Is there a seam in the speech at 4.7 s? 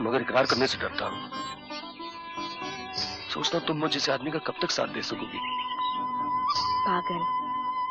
no; 0 cuts

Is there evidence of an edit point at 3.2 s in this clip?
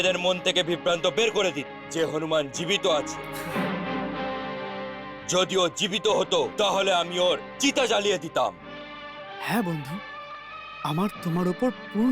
yes; 1 cut; at 3.2 s

